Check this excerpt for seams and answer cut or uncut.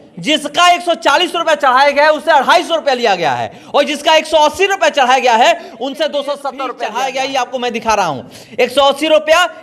cut